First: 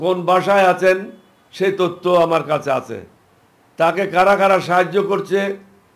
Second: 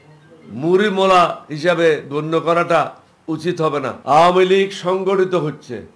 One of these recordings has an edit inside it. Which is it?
second; 1 cut; at 4.0 s

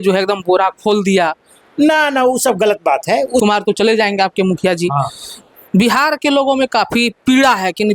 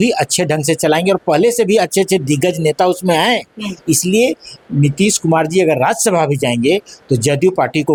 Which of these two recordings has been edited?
first; 1 cut; at 3.4 s

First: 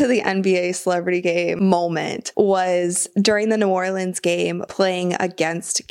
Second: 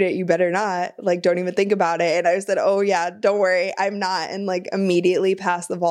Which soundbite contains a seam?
first; 2 cuts; at 1.7 s, 4.6 s

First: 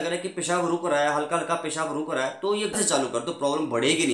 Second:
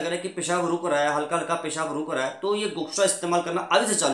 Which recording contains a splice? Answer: first; 1 cut; at 2.7 s

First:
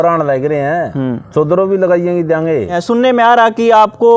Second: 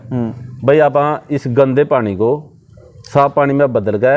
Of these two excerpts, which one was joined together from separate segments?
first; 1 cut; at 2.8 s

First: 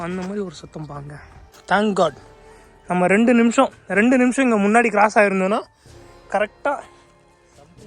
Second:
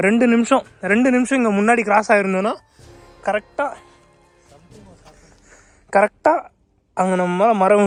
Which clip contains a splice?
first; 1 cut; at 1.5 s

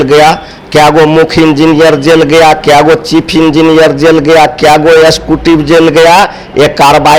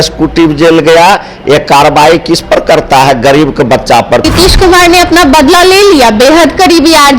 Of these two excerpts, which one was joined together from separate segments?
second; 1 cut; at 4.3 s

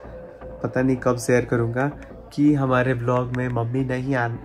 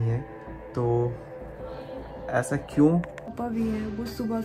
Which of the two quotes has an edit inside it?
second; 1 cut; at 3.3 s

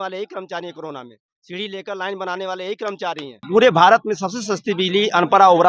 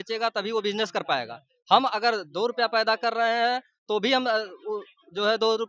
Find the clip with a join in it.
first; 1 cut; at 3.4 s

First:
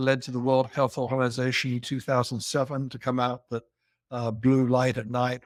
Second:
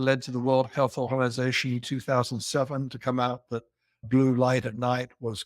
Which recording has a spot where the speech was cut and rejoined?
second; 1 cut; at 4.0 s

